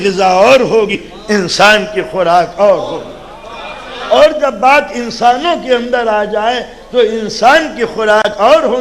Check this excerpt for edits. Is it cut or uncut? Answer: cut